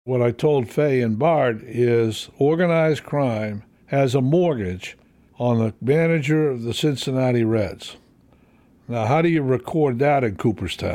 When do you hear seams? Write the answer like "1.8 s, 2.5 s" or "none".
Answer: 5.6 s